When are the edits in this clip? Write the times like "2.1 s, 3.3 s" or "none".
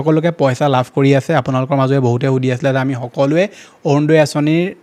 none